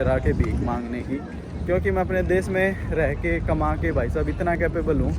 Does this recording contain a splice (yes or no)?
no